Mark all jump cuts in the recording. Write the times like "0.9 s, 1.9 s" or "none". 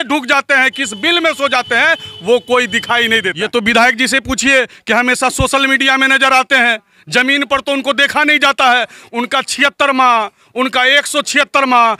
3.3 s